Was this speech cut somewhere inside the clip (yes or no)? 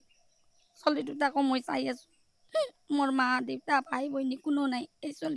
no